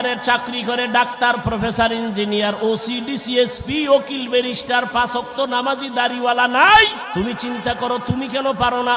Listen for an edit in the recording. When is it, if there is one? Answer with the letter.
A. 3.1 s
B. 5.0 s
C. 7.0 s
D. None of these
C